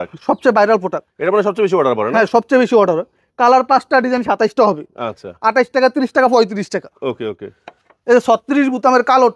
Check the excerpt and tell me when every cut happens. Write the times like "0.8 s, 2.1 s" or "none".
none

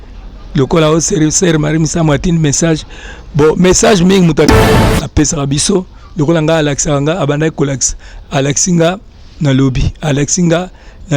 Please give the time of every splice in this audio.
4.5 s

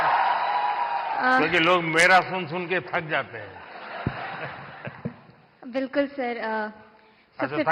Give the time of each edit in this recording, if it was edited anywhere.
none

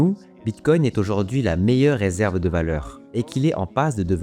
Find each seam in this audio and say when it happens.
2.9 s

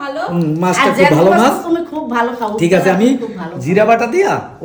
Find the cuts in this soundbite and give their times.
none

